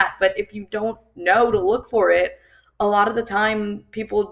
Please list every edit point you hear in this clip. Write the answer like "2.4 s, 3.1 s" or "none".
none